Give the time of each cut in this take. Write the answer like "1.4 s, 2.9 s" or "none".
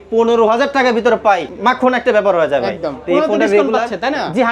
1.5 s